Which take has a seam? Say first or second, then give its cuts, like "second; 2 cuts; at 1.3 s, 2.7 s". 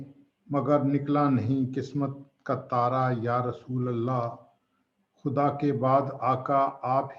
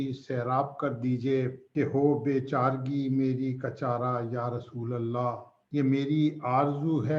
second; 2 cuts; at 1.6 s, 5.5 s